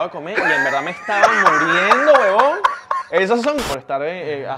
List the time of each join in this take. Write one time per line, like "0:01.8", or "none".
0:03.6